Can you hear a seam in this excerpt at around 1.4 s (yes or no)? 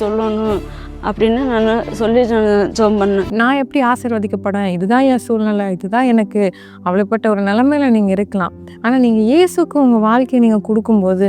no